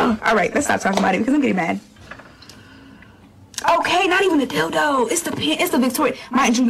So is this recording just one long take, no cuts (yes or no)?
yes